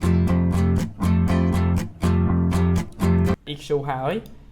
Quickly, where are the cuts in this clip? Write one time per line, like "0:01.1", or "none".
0:03.5

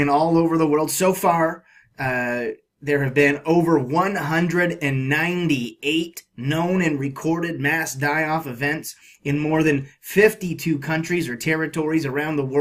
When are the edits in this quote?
0:06.6

